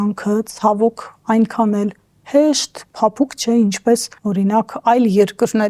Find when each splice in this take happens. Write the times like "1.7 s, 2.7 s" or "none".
4.1 s